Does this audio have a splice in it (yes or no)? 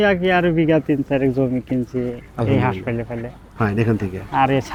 no